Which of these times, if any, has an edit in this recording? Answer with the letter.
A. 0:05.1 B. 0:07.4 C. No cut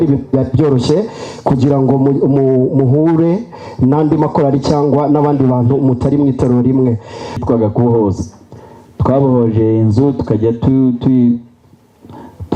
B